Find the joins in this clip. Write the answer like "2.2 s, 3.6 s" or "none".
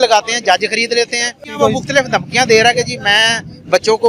1.5 s

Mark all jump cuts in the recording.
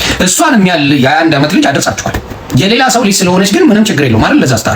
2.3 s

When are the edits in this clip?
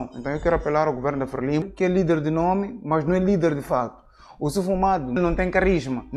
1.7 s, 5.2 s

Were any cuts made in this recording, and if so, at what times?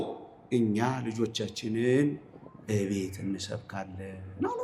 none

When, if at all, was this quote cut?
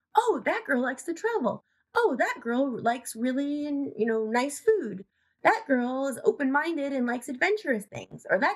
none

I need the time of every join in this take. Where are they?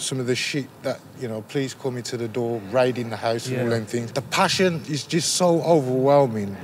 4.6 s

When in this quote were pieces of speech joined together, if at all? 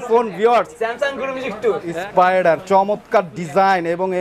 1.8 s

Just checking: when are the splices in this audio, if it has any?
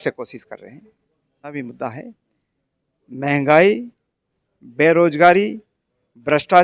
1.5 s

